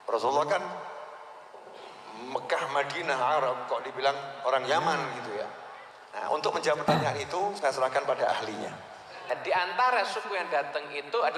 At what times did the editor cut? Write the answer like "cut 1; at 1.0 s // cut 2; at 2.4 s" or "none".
cut 1; at 9.3 s